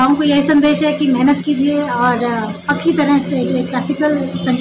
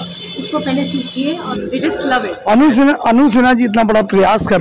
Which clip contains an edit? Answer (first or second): second